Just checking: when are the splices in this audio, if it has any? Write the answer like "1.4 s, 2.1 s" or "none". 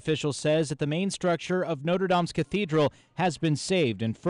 none